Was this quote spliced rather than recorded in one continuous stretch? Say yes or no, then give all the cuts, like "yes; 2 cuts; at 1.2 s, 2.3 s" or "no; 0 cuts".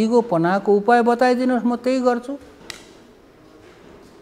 no; 0 cuts